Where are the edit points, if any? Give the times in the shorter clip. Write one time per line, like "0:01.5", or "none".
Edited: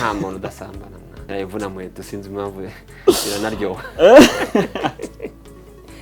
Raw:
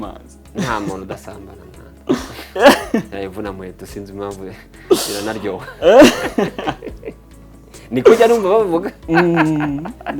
0:01.3